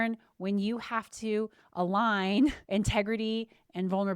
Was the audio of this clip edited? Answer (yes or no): yes